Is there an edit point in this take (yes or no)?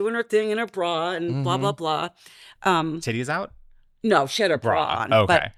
no